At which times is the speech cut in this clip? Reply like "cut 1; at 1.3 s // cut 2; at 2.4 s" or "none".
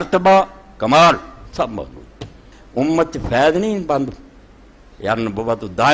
none